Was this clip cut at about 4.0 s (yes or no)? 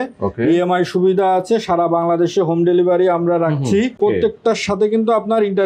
yes